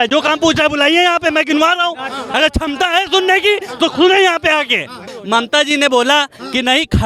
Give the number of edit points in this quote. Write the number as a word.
one